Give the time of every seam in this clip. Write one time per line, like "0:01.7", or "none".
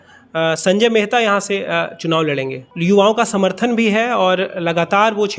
0:02.6